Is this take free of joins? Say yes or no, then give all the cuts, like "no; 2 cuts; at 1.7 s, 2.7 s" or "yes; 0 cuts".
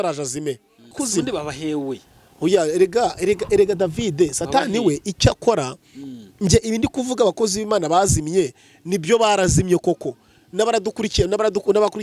no; 1 cut; at 1.0 s